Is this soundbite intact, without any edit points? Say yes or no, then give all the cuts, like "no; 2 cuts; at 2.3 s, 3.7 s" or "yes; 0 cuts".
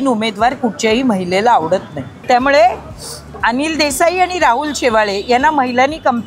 no; 1 cut; at 2.2 s